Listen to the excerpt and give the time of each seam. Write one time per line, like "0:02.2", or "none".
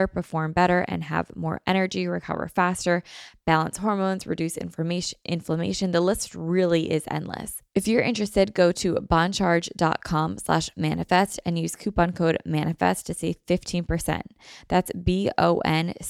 0:07.5

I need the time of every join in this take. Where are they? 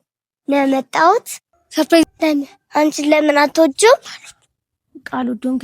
0:02.0

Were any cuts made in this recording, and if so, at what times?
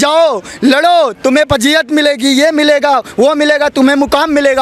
none

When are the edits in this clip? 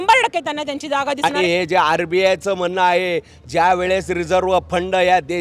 0:01.3

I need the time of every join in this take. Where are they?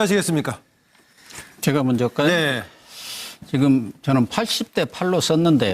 0:02.3

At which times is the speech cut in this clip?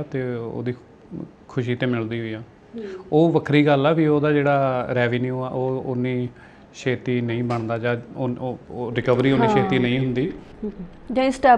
none

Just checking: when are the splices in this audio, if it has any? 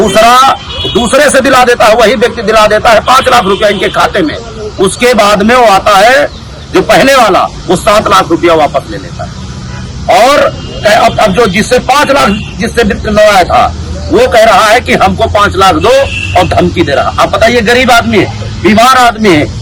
none

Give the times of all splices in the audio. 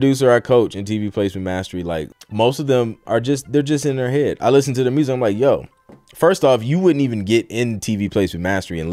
0:02.2

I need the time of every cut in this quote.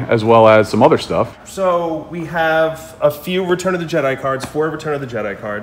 0:01.4

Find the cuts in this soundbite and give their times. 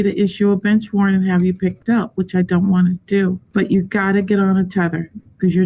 0:03.4

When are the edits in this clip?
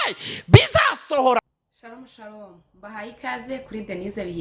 0:01.4

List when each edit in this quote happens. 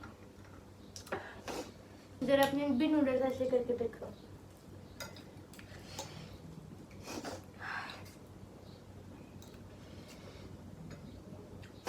0:02.1

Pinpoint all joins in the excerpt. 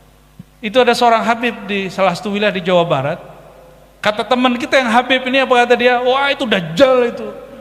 none

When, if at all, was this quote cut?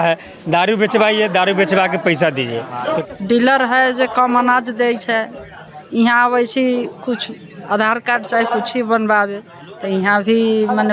0:03.0

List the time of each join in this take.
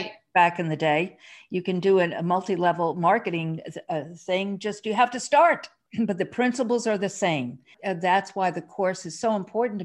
0:05.8
0:07.7

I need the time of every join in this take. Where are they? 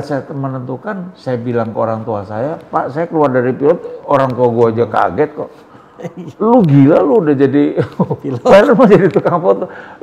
none

